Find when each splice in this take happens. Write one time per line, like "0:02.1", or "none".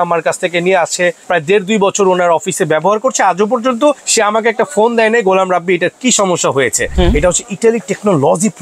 0:01.2
0:04.1
0:06.9